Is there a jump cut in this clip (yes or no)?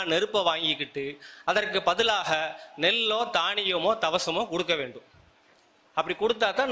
no